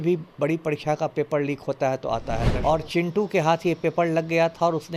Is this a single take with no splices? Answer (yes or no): no